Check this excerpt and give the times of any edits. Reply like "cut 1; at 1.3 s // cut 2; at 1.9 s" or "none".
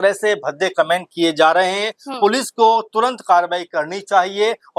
none